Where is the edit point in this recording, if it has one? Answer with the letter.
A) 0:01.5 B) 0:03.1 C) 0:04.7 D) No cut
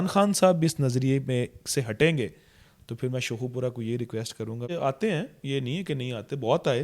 C